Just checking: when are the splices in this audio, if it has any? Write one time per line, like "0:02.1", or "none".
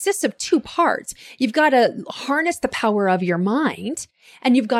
none